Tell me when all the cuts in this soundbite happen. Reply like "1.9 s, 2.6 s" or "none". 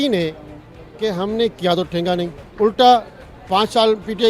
none